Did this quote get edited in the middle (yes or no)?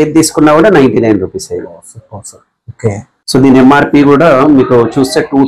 yes